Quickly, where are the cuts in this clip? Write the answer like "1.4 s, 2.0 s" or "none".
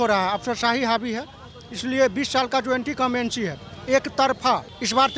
none